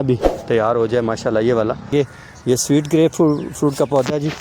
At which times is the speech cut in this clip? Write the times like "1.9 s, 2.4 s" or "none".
1.9 s

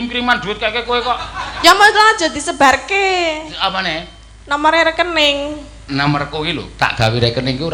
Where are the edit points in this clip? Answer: none

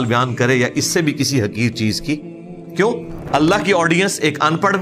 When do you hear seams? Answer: 3.1 s

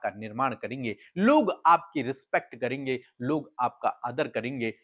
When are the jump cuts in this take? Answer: none

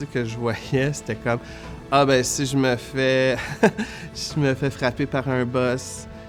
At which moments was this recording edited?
none

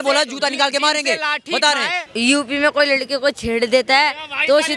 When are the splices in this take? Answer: 2.0 s

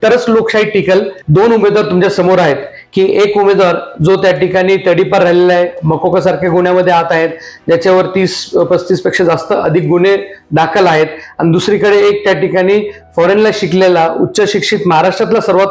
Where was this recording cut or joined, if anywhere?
1.2 s

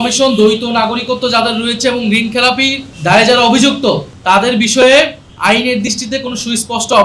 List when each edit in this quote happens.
2.9 s, 4.1 s, 5.2 s

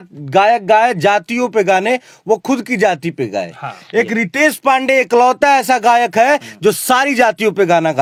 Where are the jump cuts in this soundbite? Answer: none

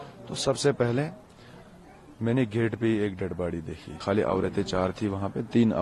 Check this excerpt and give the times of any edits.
3.9 s

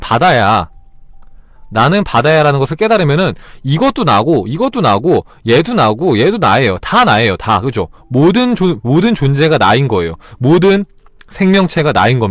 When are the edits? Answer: none

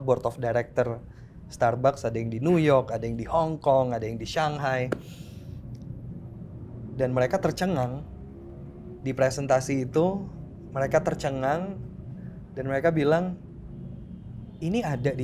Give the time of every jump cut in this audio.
none

